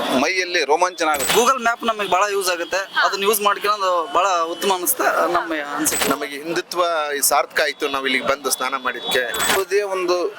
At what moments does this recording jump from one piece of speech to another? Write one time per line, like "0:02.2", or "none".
0:01.3
0:06.1
0:09.6